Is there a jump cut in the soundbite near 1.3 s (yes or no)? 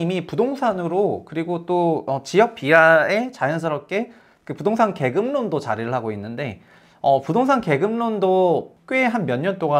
no